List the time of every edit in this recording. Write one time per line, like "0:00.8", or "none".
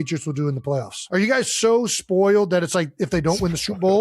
0:01.0

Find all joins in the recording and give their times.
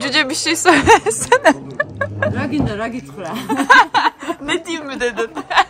none

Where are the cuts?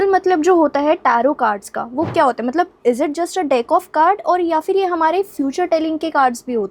none

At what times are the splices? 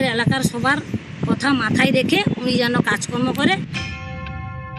0:03.7

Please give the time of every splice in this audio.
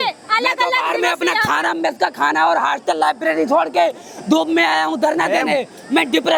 none

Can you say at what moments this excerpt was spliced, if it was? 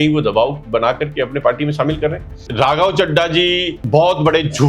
0:02.4
0:03.7

